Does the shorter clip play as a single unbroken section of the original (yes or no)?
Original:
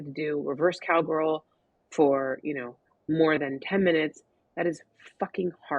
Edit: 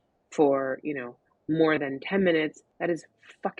no